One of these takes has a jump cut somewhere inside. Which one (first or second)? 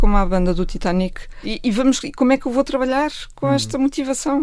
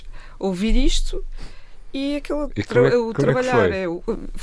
first